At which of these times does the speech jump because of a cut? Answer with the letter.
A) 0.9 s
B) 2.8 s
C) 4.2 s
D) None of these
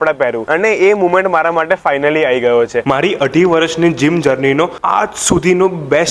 B